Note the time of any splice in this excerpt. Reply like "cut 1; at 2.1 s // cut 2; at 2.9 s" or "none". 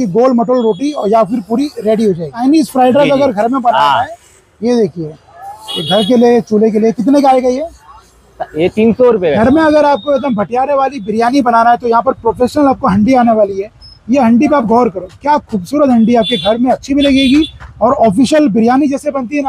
cut 1; at 2.4 s // cut 2; at 9.4 s